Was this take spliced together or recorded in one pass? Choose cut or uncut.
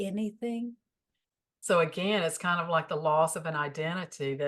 uncut